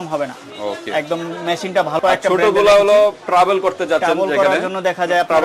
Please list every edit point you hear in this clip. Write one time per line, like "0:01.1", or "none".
0:02.0

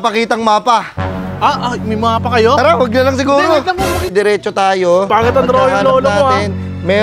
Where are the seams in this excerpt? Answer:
0:04.1

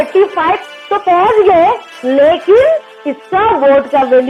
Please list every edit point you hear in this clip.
none

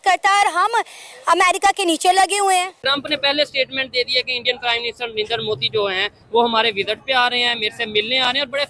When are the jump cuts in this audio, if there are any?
0:02.8

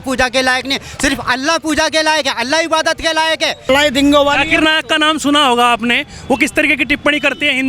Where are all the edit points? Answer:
0:03.6

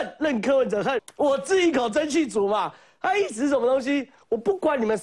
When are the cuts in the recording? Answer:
0:01.0

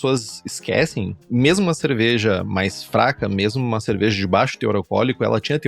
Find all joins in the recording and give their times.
0:01.2

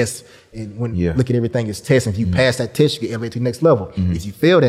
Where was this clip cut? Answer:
none

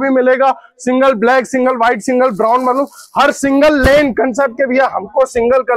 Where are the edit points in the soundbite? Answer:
none

